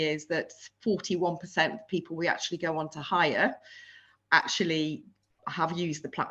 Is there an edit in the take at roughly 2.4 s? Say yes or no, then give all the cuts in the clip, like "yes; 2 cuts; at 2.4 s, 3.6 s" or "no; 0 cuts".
no; 0 cuts